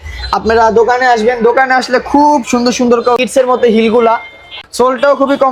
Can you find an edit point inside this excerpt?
no; 0 cuts

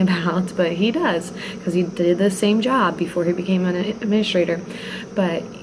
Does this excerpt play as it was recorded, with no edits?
yes; 0 cuts

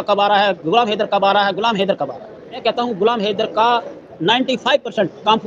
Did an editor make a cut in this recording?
yes; 1 cut; at 2.6 s

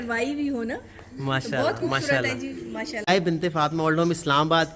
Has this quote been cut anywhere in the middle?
yes; 1 cut; at 3.1 s

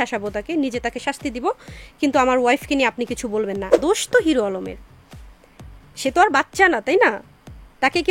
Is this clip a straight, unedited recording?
no; 1 cut; at 3.8 s

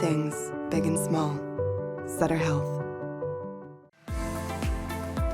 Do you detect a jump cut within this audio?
yes; 1 cut; at 3.8 s

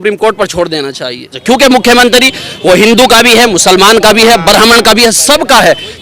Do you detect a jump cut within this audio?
yes; 1 cut; at 1.4 s

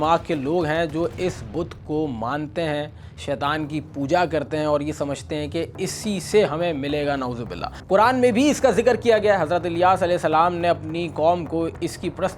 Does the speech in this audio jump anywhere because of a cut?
no; 0 cuts

